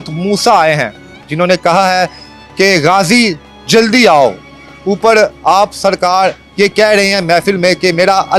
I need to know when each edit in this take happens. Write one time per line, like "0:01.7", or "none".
none